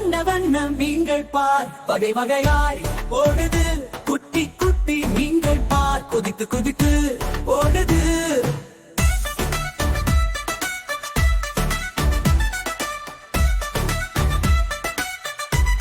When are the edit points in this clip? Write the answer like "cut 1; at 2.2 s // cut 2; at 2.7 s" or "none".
none

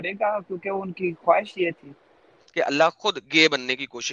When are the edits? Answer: cut 1; at 2.4 s

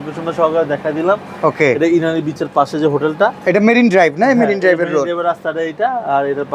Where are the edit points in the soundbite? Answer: none

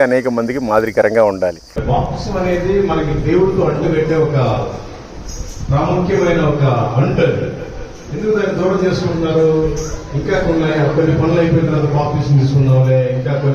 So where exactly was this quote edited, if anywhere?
cut 1; at 1.7 s

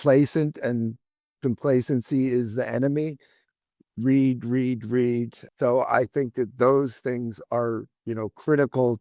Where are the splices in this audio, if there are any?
cut 1; at 3.4 s // cut 2; at 5.4 s

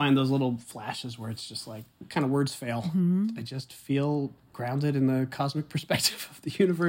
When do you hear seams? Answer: cut 1; at 2.8 s // cut 2; at 3.4 s

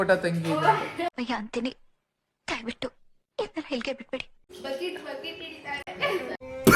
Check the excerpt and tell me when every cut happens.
cut 1; at 0.8 s // cut 2; at 4.5 s

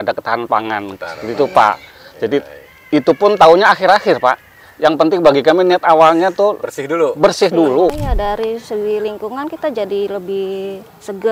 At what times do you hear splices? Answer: cut 1; at 8.0 s

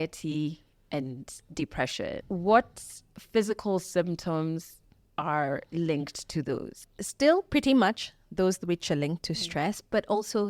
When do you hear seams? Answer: cut 1; at 2.2 s

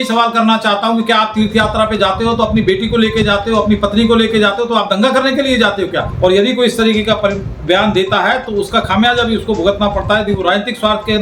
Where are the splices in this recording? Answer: cut 1; at 6.1 s

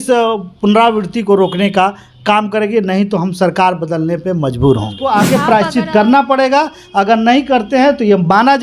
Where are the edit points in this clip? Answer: cut 1; at 5.0 s

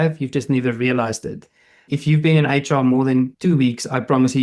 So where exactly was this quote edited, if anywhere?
cut 1; at 3.3 s

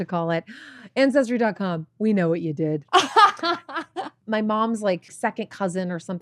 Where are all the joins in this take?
cut 1; at 4.1 s // cut 2; at 5.1 s

